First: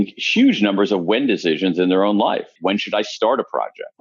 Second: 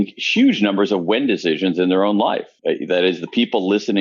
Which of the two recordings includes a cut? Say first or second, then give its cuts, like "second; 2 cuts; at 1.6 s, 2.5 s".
first; 1 cut; at 2.5 s